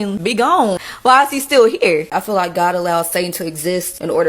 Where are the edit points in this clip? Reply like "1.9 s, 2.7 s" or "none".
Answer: 2.2 s